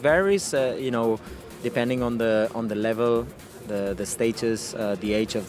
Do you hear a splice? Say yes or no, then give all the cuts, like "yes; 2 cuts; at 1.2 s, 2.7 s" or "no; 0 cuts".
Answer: no; 0 cuts